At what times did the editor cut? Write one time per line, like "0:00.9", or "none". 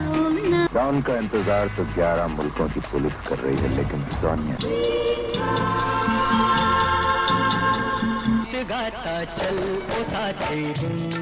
none